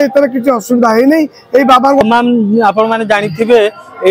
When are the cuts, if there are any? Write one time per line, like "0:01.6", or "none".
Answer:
0:02.0